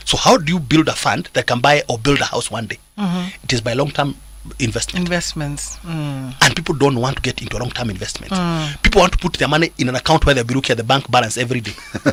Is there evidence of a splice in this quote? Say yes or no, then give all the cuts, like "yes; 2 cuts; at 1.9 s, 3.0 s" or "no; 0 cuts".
no; 0 cuts